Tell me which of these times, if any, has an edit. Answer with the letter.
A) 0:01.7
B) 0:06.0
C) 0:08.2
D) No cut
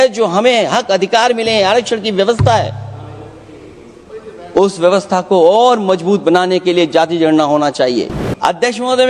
C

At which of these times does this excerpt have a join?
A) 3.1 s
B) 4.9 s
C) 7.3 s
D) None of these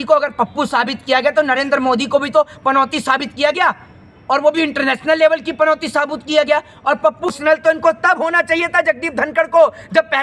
C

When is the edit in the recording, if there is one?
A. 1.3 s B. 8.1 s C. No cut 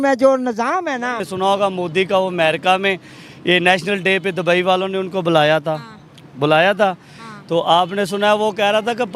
A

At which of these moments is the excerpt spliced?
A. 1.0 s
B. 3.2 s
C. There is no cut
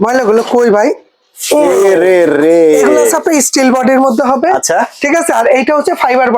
B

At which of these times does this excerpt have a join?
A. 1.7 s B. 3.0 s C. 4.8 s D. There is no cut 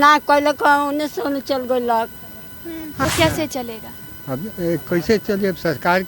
B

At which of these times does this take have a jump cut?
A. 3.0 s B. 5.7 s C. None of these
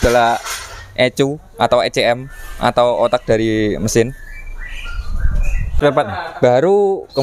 B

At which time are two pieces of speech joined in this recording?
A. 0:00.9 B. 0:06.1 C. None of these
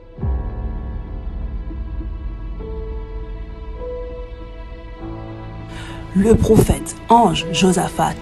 B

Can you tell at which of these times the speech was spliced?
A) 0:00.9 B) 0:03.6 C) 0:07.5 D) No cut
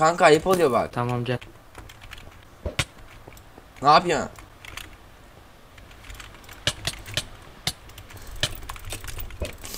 A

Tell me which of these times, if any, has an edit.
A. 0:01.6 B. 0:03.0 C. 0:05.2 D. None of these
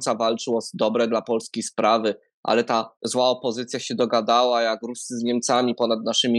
B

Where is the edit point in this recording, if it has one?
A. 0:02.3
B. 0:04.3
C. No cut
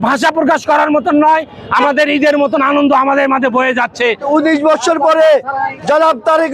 B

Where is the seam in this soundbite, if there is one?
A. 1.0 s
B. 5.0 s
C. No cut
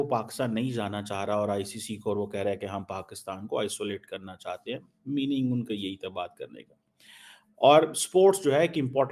C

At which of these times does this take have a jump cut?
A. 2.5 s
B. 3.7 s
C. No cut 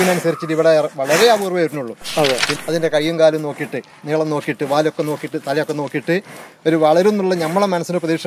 A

